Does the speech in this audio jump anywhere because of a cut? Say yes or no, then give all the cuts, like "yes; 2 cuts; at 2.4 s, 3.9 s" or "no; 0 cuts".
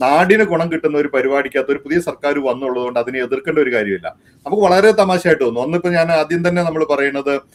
no; 0 cuts